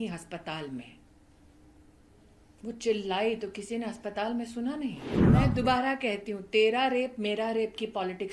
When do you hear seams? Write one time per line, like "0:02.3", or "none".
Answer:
0:05.1